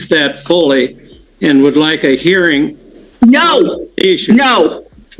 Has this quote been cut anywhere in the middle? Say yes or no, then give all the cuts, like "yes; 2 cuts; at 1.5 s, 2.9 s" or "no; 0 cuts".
no; 0 cuts